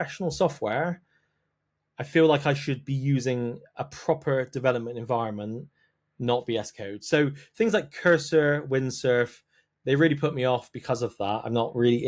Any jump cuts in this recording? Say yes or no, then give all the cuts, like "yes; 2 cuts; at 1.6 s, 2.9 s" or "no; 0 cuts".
no; 0 cuts